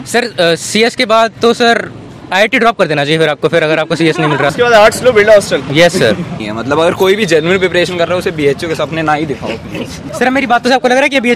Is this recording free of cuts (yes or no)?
no